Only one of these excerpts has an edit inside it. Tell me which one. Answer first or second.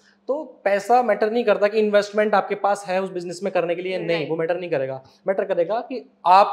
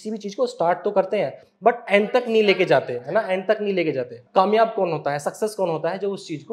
second